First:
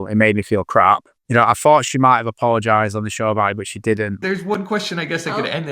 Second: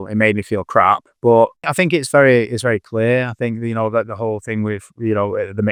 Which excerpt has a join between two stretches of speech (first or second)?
first